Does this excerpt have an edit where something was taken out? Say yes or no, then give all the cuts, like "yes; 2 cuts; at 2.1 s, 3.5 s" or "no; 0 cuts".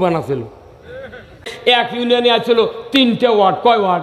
yes; 1 cut; at 1.5 s